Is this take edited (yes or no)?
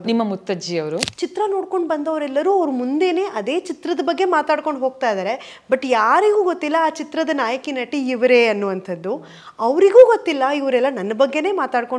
yes